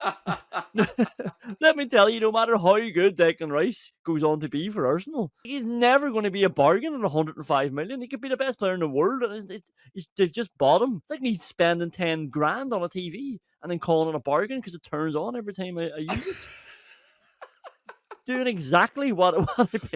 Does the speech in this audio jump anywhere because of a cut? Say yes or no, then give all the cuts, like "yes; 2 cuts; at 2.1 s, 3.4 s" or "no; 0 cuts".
yes; 2 cuts; at 5.4 s, 11.1 s